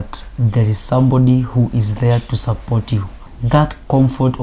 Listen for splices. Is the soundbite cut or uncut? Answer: cut